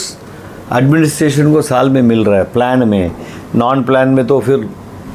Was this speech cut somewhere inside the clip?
no; 0 cuts

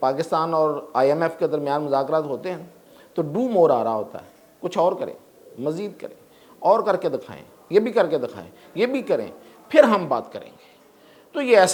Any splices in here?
no; 0 cuts

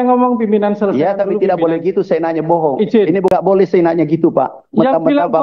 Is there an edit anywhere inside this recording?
yes; 1 cut; at 3.3 s

